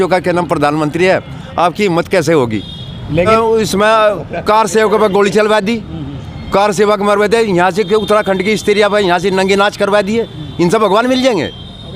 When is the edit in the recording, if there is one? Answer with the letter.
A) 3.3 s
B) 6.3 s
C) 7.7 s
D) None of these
A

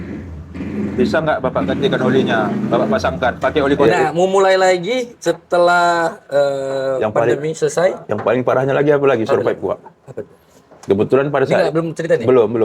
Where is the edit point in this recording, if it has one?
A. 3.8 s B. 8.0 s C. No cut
A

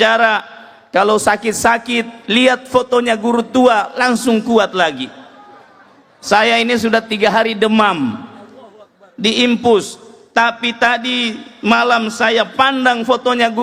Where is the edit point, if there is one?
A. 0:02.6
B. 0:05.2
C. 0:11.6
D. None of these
D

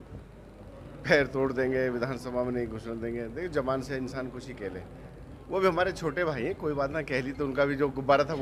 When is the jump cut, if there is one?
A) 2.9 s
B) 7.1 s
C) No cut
C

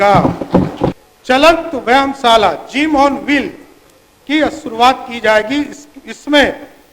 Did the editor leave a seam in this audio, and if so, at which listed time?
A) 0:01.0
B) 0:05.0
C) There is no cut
A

